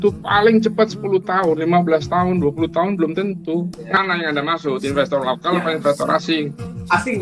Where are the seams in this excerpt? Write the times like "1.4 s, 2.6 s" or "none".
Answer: 4.0 s